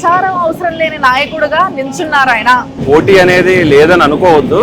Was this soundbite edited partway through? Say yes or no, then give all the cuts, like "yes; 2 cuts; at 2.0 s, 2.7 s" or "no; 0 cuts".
yes; 1 cut; at 2.8 s